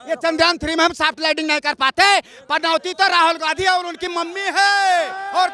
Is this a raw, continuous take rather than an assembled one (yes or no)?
yes